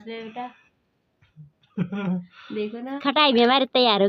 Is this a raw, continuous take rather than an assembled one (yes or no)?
no